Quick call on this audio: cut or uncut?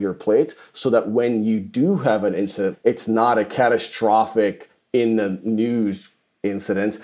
cut